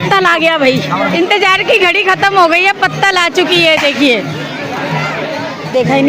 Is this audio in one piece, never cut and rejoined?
yes; 0 cuts

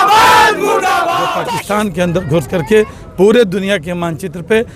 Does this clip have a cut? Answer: yes; 1 cut; at 1.3 s

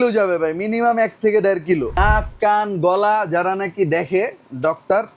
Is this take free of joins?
no; 1 cut; at 1.9 s

